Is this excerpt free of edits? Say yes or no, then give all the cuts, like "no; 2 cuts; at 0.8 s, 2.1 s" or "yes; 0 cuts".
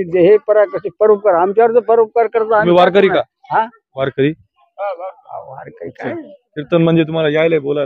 yes; 0 cuts